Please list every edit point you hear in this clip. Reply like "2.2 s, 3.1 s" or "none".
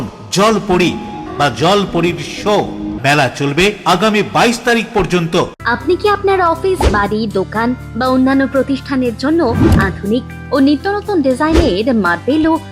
1.2 s, 2.9 s, 5.6 s

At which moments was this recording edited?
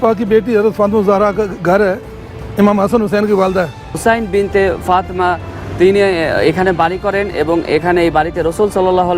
3.9 s

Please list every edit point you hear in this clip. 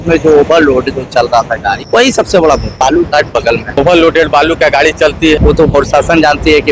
1.8 s, 2.7 s, 3.7 s, 5.4 s

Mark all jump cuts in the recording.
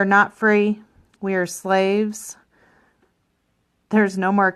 3.0 s

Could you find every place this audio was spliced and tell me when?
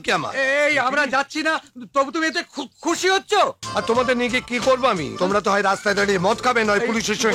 3.6 s

